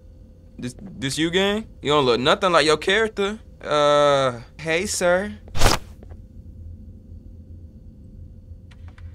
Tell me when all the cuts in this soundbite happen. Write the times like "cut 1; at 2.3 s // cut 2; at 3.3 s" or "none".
cut 1; at 1.7 s // cut 2; at 3.5 s // cut 3; at 4.5 s